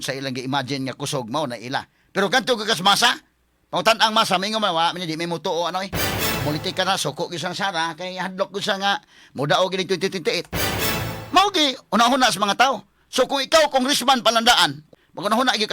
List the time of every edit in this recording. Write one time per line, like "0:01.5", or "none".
0:14.8